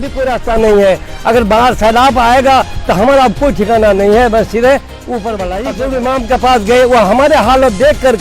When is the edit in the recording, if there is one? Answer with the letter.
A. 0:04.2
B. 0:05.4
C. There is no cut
B